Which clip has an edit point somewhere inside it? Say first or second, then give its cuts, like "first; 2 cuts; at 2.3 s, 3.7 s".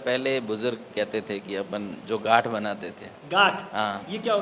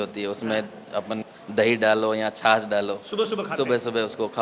second; 1 cut; at 1.2 s